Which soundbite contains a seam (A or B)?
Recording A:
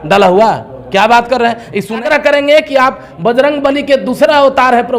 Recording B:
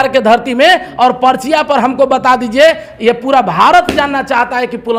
A